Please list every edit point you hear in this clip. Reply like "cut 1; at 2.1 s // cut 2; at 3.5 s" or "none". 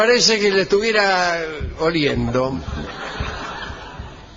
cut 1; at 2.4 s